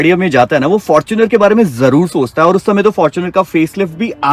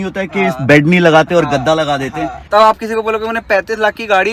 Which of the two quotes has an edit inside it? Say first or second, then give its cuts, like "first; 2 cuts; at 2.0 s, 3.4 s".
second; 1 cut; at 2.3 s